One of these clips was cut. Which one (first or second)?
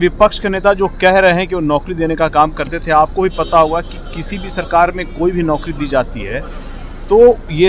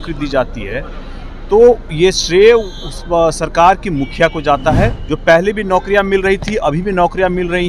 second